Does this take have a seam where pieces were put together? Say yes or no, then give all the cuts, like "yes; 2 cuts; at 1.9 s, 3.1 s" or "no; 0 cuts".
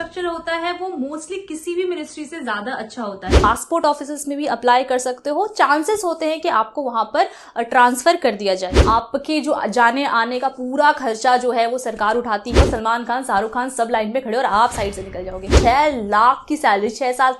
yes; 4 cuts; at 3.4 s, 8.7 s, 12.6 s, 15.5 s